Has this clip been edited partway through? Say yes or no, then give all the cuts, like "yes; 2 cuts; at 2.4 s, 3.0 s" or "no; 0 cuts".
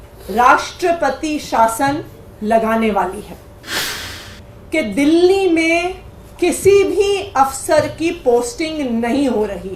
yes; 1 cut; at 4.0 s